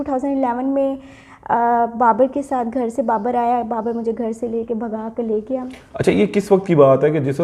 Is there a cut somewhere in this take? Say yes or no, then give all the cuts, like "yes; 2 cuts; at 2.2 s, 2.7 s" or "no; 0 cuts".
no; 0 cuts